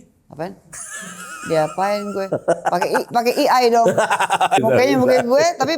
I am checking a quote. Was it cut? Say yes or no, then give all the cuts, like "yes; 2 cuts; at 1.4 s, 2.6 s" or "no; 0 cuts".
yes; 1 cut; at 4.6 s